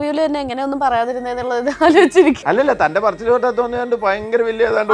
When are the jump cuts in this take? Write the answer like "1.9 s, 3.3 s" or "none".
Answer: 2.4 s